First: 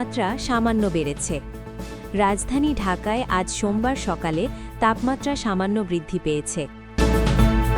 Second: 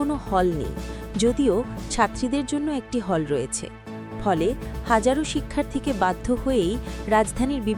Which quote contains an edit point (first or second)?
first